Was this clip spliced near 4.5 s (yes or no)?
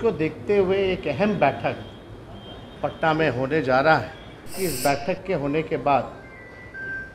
yes